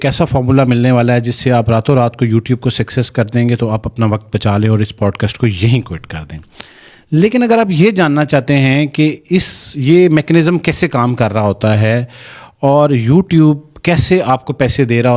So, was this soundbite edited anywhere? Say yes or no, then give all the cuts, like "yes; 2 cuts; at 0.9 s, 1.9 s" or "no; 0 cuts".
no; 0 cuts